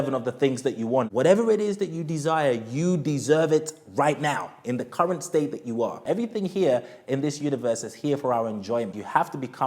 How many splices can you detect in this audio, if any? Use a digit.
3